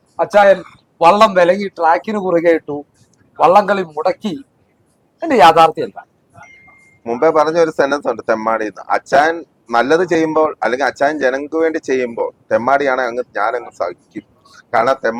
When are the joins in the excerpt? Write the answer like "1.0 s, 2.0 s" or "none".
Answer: none